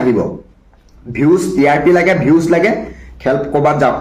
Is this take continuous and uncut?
yes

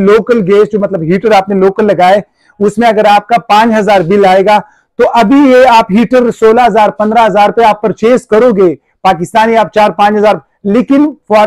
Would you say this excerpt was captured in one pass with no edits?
yes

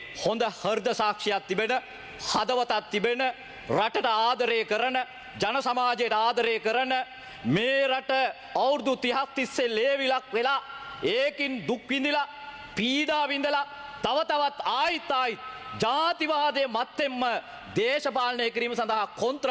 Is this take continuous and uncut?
yes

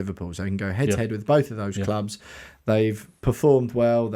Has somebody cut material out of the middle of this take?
no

